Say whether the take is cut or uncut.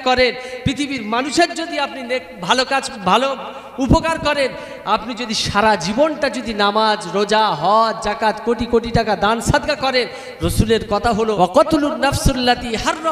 cut